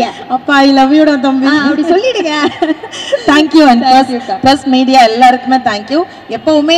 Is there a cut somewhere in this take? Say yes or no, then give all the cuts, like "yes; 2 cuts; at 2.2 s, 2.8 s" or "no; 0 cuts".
no; 0 cuts